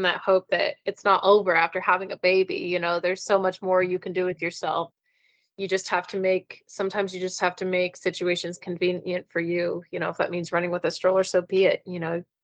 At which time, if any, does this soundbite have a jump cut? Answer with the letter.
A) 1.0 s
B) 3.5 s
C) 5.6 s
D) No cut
D